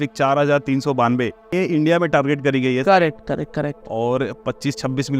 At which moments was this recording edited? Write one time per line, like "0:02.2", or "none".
0:01.5